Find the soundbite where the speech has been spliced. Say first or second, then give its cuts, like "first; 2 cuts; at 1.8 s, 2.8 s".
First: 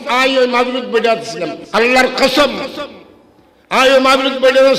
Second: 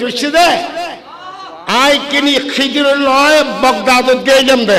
first; 1 cut; at 1.6 s